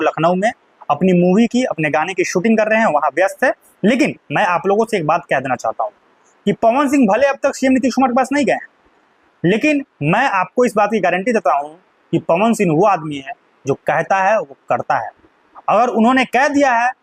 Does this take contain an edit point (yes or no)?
no